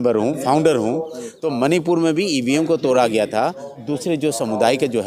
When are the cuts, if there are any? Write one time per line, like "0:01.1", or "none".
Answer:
0:03.7